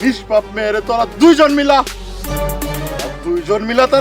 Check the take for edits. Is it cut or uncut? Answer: uncut